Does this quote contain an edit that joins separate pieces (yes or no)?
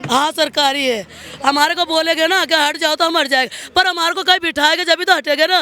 no